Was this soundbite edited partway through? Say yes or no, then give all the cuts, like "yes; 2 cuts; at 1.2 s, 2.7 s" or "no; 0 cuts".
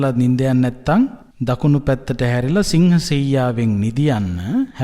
yes; 1 cut; at 1.3 s